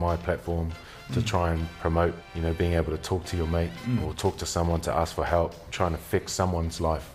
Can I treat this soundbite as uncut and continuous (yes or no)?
no